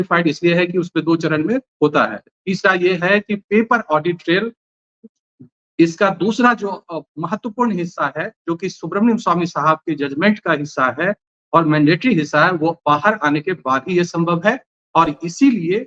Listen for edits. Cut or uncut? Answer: uncut